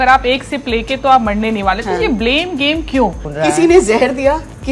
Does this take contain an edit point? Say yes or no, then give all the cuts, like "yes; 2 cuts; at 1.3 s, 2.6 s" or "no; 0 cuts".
yes; 1 cut; at 3.3 s